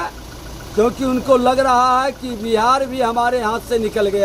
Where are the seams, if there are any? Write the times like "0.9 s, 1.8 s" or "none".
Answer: none